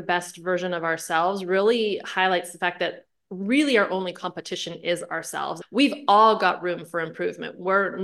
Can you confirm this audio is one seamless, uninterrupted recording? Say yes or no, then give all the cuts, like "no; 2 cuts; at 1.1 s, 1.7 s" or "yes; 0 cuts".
no; 1 cut; at 5.6 s